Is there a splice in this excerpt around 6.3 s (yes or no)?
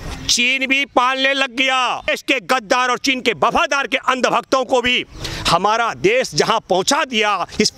no